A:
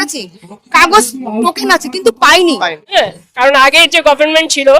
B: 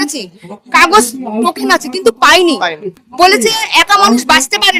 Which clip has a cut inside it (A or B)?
A